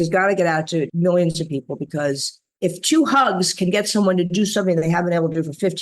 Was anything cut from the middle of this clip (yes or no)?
yes